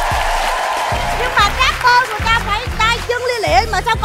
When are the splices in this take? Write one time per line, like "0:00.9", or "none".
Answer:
none